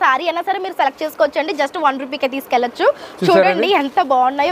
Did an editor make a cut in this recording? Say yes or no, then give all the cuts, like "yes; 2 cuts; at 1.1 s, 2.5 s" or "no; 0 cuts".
no; 0 cuts